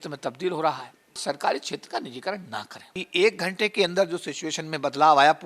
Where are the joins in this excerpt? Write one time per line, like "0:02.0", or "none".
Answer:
0:01.2
0:03.0